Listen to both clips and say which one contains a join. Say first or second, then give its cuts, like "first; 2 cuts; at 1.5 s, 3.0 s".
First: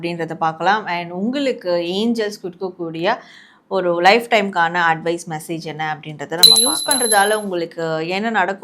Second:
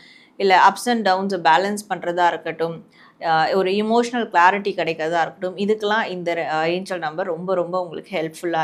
first; 1 cut; at 6.7 s